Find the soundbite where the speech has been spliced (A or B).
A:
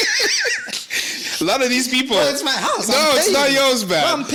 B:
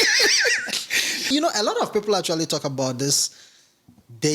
B